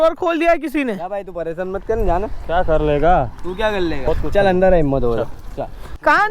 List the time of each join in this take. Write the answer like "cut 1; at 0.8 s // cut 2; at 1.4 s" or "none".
none